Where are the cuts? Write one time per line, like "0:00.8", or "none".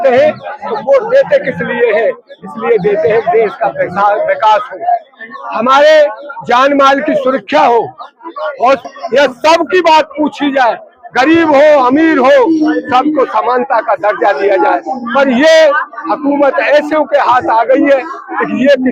0:08.8